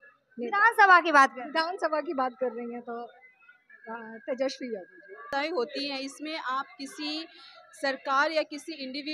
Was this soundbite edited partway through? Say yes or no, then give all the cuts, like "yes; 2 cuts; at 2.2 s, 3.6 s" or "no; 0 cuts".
yes; 1 cut; at 5.3 s